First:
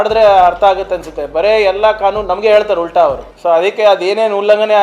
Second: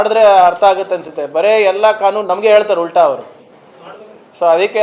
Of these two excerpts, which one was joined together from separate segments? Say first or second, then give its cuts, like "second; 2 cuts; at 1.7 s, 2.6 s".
first; 1 cut; at 3.3 s